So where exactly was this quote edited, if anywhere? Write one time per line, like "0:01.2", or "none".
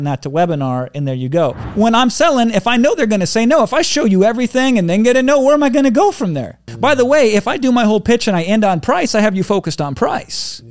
0:01.7
0:06.7